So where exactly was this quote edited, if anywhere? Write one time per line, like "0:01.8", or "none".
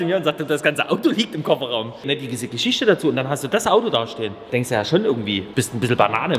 0:02.0
0:04.4
0:05.4